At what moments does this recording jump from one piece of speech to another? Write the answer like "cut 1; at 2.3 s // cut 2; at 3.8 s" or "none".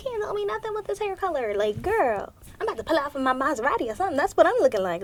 none